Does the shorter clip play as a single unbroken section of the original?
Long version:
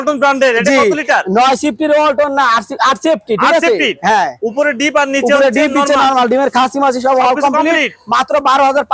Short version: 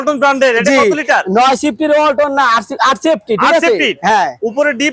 yes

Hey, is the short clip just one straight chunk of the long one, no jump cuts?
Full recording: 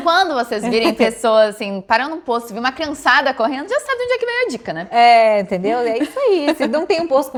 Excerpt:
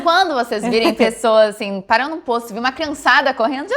yes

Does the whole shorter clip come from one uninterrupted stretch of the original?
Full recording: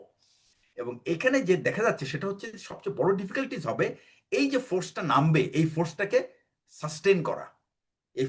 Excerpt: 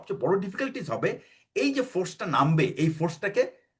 yes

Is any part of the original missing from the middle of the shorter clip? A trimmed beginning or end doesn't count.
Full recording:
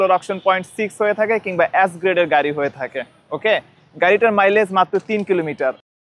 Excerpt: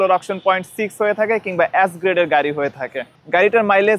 yes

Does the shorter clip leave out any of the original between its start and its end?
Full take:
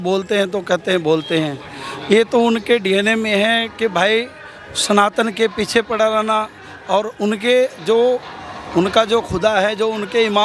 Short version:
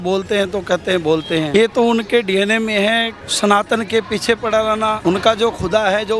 yes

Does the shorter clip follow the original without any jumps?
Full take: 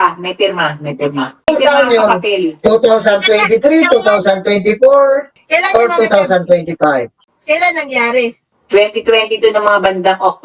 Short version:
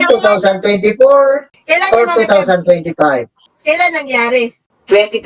yes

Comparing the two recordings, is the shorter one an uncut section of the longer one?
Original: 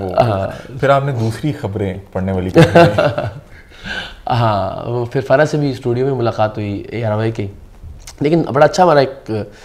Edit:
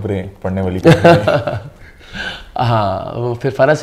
yes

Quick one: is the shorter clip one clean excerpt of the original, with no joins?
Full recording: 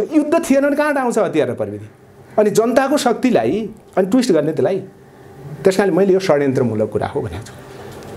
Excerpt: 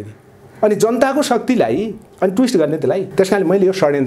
no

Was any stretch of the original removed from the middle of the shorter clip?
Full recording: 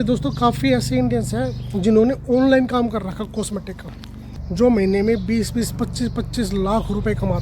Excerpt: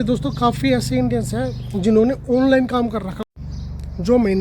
yes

